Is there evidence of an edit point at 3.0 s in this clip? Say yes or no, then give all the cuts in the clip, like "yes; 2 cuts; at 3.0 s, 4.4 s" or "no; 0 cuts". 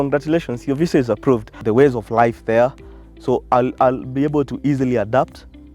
no; 1 cut; at 1.5 s